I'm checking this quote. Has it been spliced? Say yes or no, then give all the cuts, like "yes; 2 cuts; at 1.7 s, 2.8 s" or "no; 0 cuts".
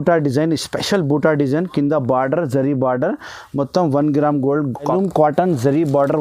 yes; 1 cut; at 4.9 s